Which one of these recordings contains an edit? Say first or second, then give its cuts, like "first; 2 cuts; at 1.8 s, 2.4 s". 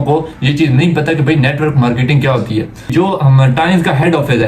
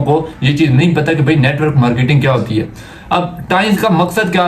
first; 1 cut; at 2.9 s